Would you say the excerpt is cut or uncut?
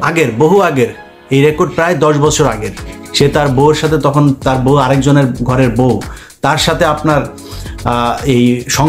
uncut